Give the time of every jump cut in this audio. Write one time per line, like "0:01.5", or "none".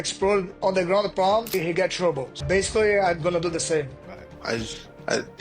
0:04.4

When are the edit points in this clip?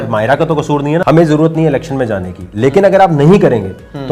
0:01.0

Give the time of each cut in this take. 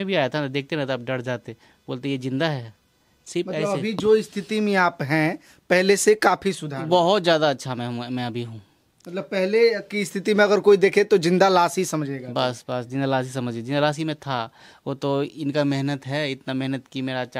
none

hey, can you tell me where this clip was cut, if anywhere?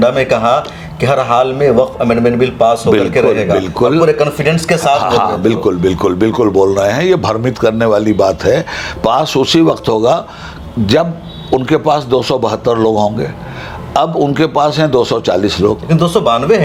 none

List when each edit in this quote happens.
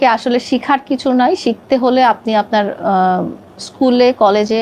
none

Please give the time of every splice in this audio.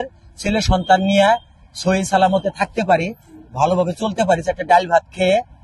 none

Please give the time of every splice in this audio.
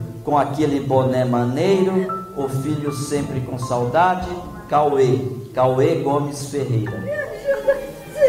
0:07.3

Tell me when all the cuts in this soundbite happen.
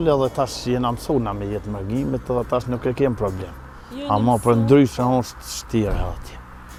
none

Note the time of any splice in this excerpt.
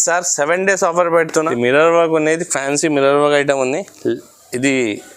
0:01.5

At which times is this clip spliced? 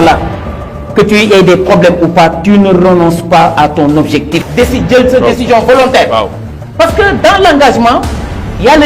0:04.5

